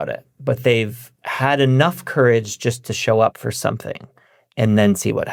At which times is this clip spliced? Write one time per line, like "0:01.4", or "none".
none